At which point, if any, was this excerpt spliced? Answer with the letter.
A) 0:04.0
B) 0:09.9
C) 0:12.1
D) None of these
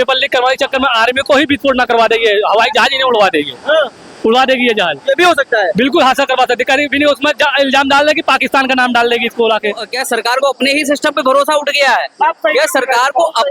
B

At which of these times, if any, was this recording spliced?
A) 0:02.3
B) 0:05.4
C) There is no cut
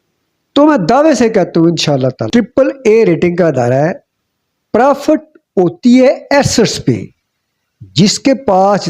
A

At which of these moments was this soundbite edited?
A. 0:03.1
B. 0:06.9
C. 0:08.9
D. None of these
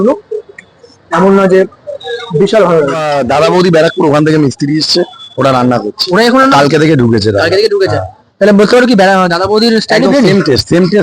A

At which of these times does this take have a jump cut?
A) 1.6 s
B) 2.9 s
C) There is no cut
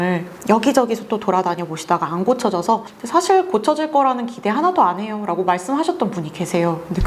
B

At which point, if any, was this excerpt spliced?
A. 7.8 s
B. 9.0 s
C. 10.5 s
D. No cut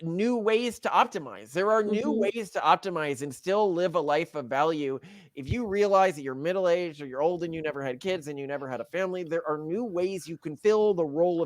C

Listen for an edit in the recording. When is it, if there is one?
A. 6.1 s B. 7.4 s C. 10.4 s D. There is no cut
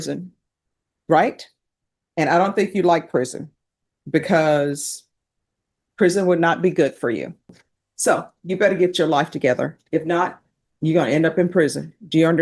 B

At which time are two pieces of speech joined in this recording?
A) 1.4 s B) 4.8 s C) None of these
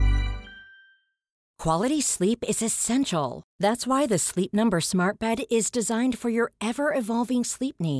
A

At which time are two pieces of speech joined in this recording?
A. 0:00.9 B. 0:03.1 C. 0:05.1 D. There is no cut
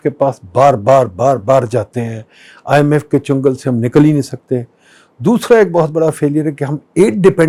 D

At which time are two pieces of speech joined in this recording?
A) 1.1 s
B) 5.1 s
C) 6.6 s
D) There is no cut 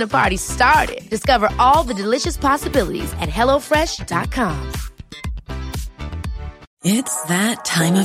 C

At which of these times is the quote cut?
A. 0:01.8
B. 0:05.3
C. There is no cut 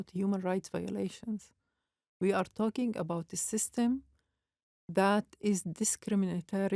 C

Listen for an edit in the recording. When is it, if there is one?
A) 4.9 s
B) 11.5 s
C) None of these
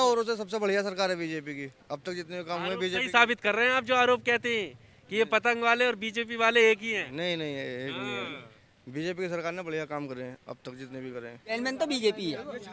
B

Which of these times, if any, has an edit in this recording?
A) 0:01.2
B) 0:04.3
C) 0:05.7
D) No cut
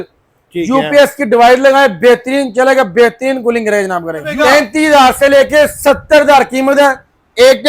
B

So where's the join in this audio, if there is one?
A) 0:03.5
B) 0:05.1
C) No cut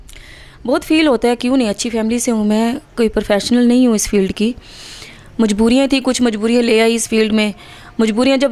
C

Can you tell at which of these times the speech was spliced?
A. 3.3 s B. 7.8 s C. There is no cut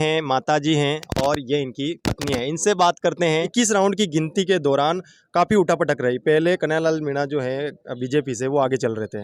A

